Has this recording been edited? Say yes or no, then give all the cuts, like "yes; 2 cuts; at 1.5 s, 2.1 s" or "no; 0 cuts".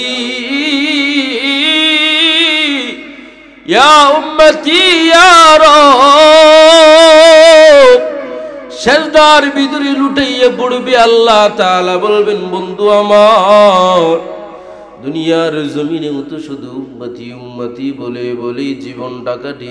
no; 0 cuts